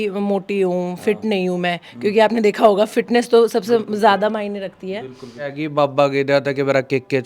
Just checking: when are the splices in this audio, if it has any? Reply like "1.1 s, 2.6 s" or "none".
5.5 s

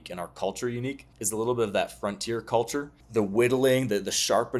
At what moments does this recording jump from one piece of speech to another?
1.1 s, 3.0 s

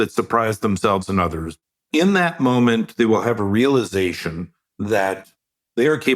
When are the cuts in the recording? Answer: 1.7 s

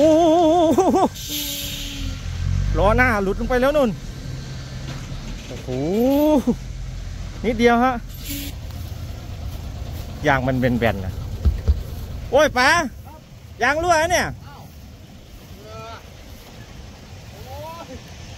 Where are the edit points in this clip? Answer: 8.5 s

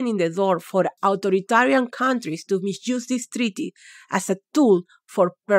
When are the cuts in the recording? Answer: 0.9 s

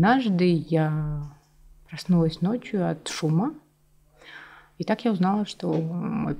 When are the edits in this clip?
none

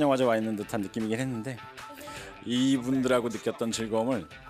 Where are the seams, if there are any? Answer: 2.3 s

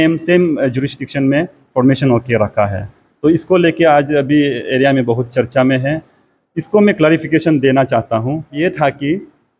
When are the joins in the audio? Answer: 8.6 s

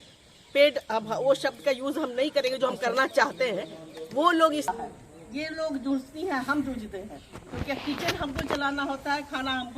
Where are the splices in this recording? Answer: 4.7 s

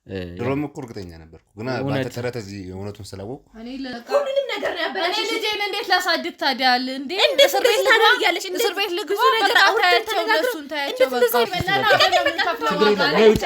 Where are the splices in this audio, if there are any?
3.9 s, 11.5 s

